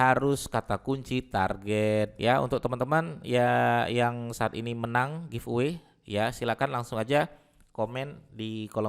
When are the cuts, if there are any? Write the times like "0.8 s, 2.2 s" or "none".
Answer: 2.1 s